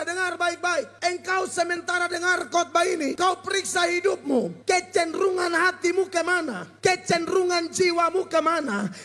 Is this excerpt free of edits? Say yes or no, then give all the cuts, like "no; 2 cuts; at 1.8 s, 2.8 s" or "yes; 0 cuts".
no; 4 cuts; at 0.9 s, 3.2 s, 4.5 s, 6.6 s